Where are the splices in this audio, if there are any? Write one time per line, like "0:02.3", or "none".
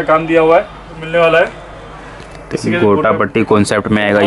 0:01.0